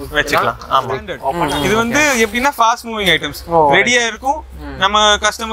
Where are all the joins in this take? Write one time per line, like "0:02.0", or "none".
0:01.5